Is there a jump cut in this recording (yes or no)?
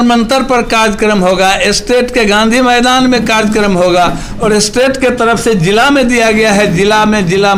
no